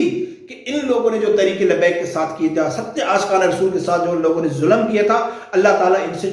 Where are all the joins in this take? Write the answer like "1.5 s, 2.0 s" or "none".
none